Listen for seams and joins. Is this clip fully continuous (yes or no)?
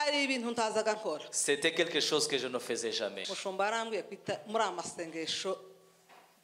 no